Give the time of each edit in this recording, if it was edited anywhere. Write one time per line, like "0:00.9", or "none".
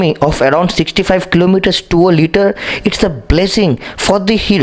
none